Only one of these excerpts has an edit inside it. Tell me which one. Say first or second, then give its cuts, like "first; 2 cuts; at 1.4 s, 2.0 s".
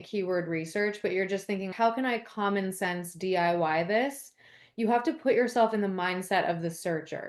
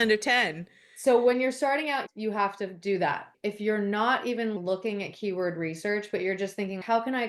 second; 1 cut; at 3.3 s